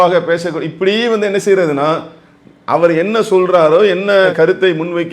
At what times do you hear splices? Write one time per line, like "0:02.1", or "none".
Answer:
none